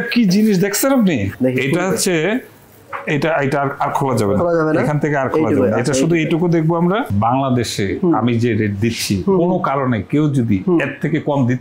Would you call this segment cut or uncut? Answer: cut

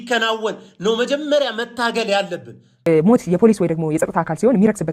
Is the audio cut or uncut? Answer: cut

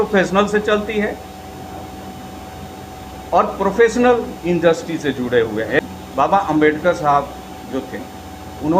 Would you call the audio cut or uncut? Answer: cut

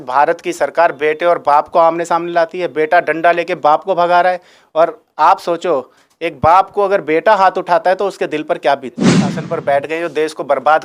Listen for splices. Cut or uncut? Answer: cut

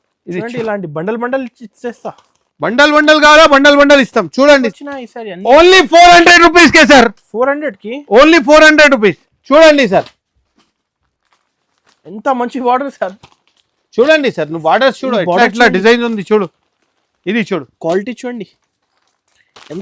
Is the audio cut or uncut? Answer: cut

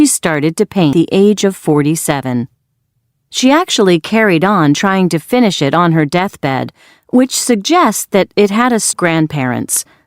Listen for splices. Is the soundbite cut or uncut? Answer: cut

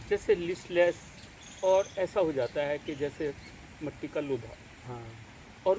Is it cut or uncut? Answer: uncut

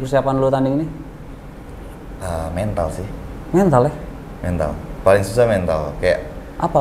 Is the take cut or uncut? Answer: uncut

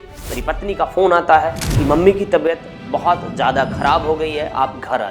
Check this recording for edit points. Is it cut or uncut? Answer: uncut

